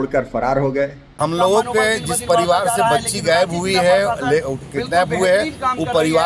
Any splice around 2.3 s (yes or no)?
no